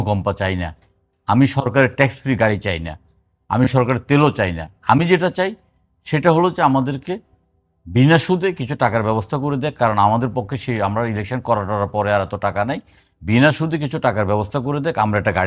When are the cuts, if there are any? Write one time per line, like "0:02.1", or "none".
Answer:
none

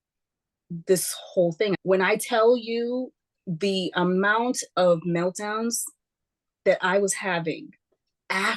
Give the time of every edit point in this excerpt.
0:01.8

